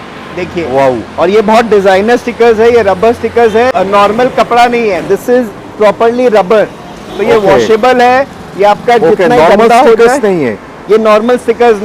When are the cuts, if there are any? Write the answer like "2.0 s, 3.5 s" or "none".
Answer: 3.7 s